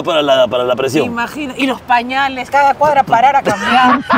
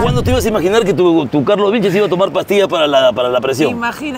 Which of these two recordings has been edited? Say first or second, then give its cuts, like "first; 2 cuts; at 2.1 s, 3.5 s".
first; 1 cut; at 2.5 s